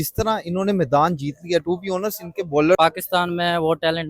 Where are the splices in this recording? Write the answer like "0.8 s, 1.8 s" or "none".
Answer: 2.8 s